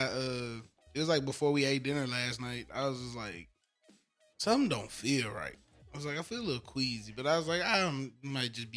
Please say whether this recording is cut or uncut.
uncut